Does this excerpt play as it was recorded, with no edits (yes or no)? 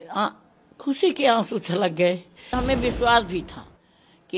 no